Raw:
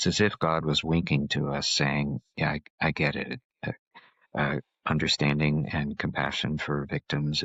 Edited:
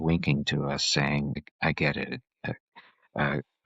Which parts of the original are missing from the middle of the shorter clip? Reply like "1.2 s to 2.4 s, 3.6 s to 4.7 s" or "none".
2.3 s to 2.6 s